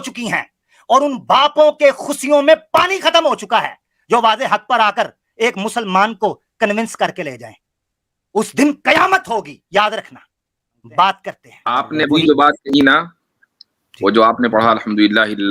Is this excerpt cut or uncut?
cut